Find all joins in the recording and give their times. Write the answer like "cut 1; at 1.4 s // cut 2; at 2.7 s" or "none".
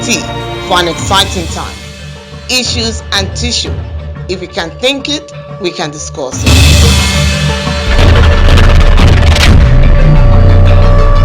none